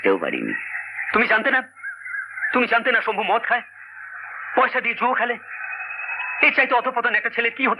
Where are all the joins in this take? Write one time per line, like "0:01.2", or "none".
none